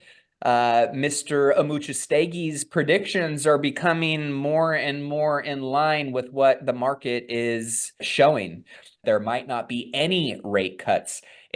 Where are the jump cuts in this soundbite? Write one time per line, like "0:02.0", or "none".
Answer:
0:08.1
0:09.0